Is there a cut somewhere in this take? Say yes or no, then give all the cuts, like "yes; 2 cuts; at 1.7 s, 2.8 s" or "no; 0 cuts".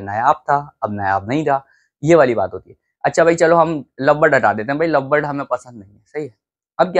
no; 0 cuts